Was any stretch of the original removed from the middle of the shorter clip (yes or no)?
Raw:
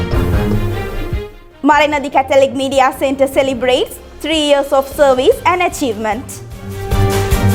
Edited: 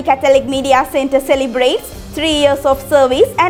no